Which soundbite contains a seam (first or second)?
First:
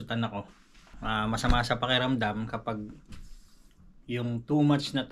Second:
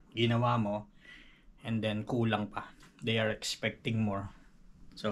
first